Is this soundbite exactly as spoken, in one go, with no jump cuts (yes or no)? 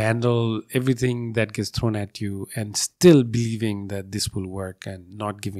yes